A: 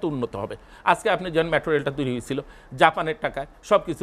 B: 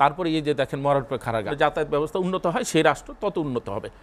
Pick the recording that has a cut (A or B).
B